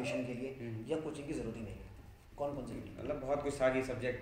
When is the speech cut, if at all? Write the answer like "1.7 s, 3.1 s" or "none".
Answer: 2.2 s